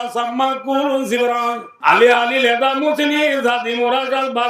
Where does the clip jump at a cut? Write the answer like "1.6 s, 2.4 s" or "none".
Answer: 1.7 s